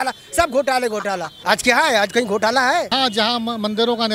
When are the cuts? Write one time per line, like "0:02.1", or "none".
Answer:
0:01.3
0:02.9